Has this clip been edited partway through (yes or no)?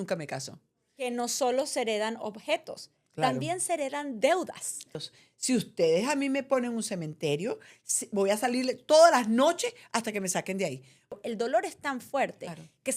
yes